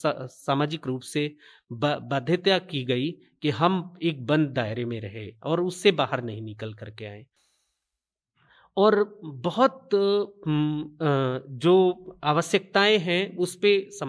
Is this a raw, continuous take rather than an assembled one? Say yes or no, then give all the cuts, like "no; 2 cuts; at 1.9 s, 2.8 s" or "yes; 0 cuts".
yes; 0 cuts